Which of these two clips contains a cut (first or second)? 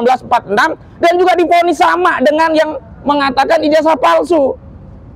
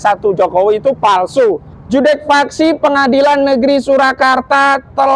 second